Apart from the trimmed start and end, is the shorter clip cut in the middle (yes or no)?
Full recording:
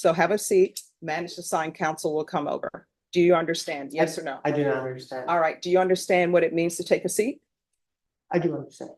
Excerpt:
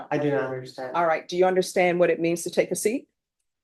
no